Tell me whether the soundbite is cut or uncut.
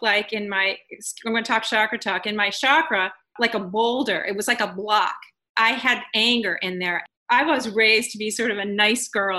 uncut